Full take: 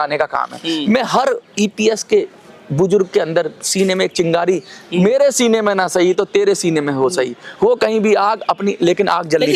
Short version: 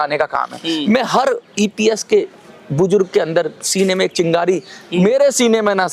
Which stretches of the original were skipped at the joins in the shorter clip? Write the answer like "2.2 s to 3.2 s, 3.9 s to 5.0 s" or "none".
none